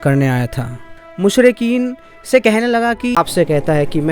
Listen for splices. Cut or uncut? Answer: cut